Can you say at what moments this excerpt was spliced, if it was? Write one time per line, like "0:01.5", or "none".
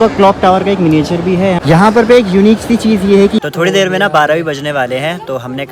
0:01.6
0:03.4